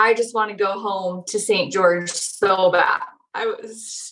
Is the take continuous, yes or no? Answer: no